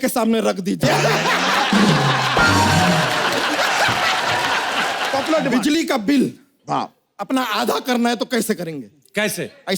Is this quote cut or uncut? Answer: cut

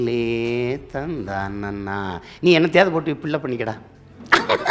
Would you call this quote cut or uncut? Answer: uncut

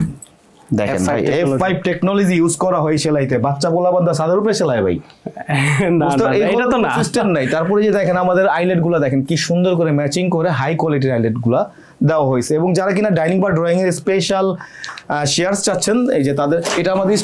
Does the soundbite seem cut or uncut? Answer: uncut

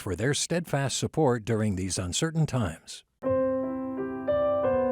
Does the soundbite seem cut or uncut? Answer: cut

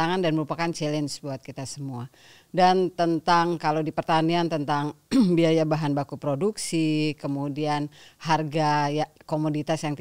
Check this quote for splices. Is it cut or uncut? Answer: uncut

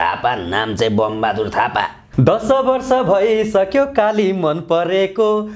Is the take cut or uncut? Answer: cut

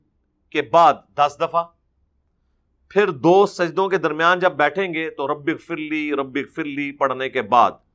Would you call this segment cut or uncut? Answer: uncut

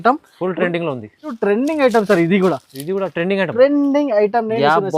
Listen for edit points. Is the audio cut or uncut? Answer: cut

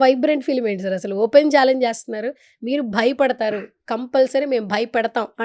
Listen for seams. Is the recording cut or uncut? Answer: uncut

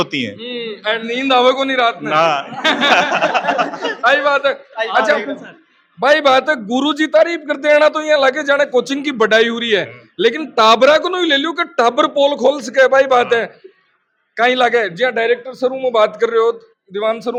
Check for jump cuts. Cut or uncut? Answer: uncut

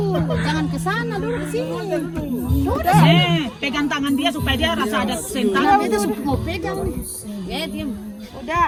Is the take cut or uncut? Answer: uncut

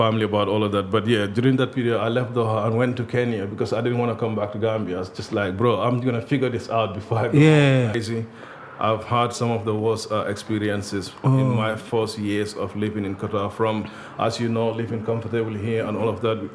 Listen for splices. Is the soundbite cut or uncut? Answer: cut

